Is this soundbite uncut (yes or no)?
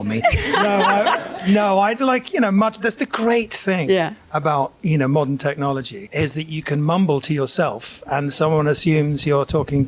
no